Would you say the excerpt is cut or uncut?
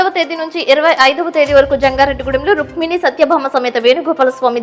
uncut